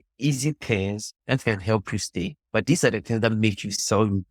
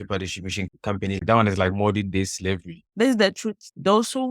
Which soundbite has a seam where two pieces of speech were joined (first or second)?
second